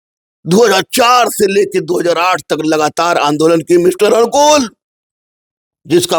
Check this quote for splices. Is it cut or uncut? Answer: uncut